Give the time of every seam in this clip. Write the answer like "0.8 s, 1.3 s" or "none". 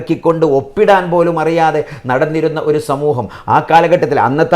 none